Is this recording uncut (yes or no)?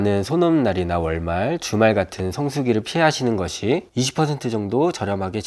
yes